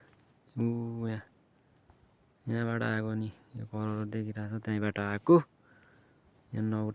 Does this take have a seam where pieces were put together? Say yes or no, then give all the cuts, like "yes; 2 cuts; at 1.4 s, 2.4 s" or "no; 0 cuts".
no; 0 cuts